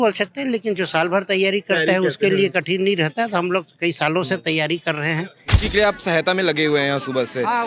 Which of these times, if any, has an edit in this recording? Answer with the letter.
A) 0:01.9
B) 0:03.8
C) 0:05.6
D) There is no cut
C